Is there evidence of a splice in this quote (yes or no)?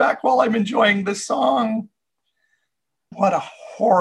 yes